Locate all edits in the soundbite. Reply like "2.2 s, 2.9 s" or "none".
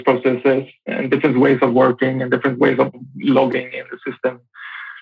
0.9 s, 3.0 s